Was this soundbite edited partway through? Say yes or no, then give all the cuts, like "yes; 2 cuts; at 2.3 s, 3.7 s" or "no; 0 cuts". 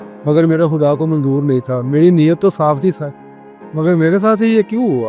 no; 0 cuts